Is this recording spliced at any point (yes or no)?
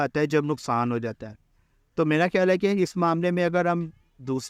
no